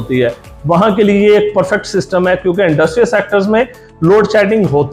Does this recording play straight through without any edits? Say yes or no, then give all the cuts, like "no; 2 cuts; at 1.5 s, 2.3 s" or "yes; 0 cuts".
yes; 0 cuts